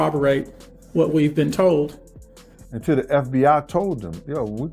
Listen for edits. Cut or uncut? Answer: cut